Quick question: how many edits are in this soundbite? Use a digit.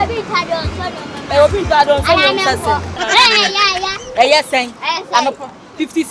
1